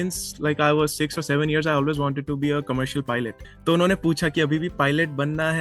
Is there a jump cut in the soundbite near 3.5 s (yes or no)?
yes